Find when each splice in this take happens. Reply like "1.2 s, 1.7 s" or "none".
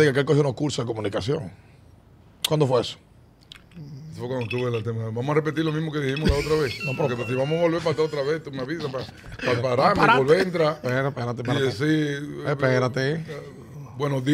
none